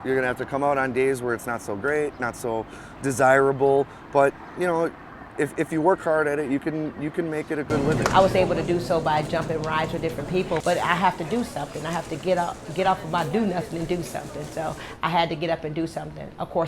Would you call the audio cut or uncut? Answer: cut